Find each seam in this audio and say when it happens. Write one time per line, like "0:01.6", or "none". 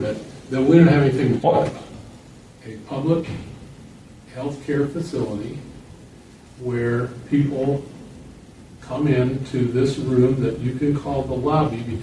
0:01.8